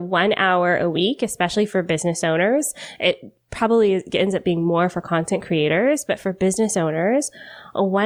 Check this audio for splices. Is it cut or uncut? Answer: uncut